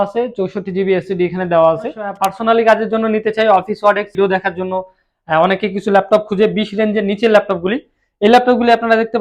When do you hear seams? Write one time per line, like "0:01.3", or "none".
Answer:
0:02.2
0:04.2